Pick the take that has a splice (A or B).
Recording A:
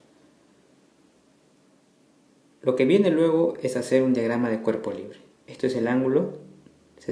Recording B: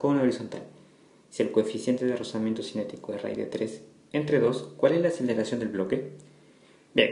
A